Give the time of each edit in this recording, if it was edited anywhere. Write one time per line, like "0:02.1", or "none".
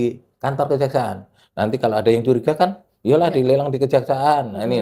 none